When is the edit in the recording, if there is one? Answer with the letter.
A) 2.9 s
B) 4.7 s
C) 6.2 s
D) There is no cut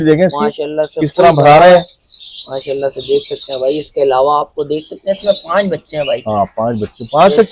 D